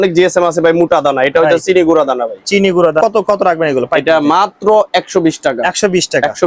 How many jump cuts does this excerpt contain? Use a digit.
1